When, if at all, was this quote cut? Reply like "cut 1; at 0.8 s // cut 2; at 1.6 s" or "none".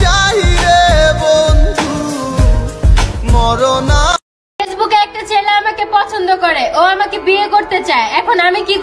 cut 1; at 4.4 s

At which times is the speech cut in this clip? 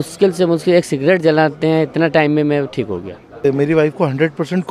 cut 1; at 3.5 s

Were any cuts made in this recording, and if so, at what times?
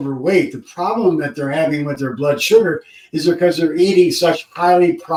none

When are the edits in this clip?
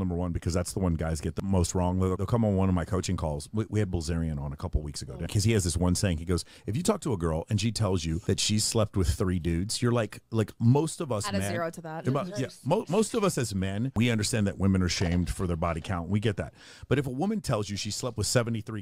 cut 1; at 1.4 s // cut 2; at 2.2 s // cut 3; at 5.3 s // cut 4; at 8.2 s // cut 5; at 13.9 s

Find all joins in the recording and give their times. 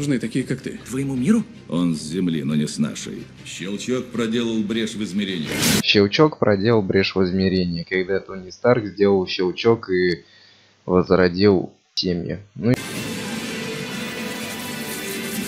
none

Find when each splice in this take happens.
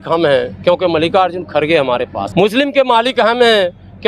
cut 1; at 2.2 s

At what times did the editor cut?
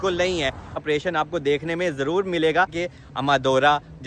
cut 1; at 0.8 s // cut 2; at 2.8 s

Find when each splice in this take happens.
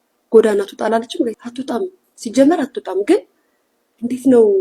cut 1; at 1.5 s

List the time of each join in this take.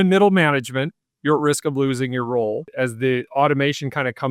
cut 1; at 2.7 s

